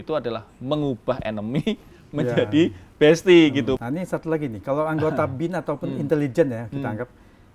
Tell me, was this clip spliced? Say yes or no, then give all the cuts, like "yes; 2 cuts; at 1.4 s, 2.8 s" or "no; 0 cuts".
yes; 1 cut; at 3.8 s